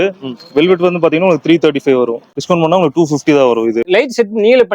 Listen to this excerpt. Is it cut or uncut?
cut